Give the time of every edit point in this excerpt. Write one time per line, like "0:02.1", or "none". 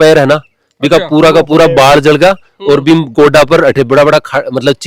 none

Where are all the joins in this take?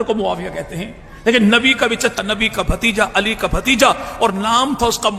0:02.1

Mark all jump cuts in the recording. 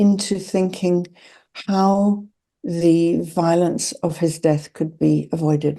none

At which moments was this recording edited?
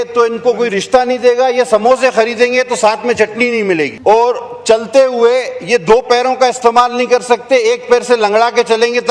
0:03.9

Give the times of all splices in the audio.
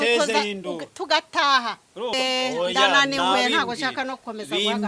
0:02.1

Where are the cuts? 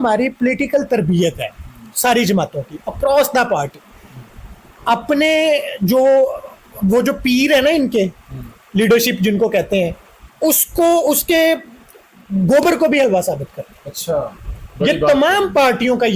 none

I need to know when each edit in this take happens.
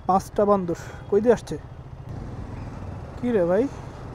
none

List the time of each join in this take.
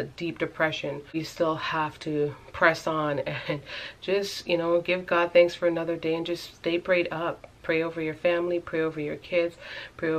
0:01.2

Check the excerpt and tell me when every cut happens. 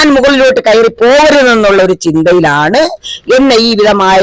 none

